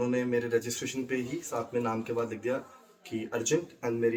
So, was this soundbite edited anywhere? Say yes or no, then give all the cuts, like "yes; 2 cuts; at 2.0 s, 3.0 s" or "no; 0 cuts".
no; 0 cuts